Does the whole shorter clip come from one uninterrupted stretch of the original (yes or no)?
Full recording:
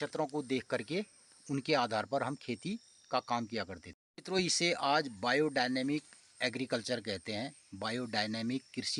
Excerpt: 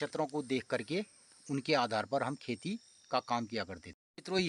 yes